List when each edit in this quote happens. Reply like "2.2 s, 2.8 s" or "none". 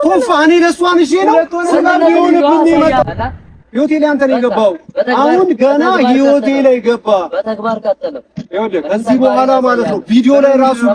3.1 s